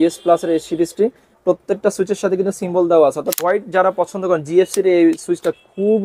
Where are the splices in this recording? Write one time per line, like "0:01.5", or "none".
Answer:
0:03.4